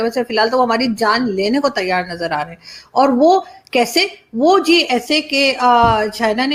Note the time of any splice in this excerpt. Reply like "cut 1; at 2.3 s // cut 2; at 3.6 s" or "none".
none